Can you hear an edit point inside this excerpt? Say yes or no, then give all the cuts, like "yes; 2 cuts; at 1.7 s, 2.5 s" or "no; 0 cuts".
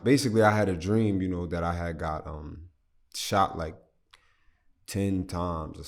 no; 0 cuts